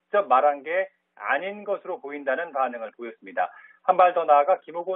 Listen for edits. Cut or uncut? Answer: uncut